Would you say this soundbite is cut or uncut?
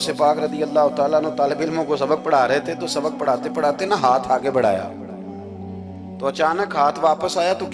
uncut